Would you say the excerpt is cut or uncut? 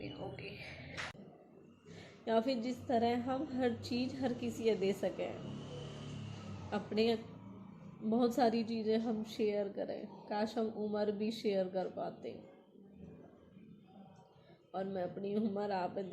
cut